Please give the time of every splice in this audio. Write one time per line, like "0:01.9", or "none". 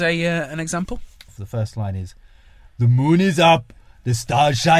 0:01.4